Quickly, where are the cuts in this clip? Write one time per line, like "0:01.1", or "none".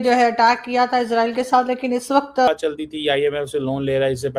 0:02.5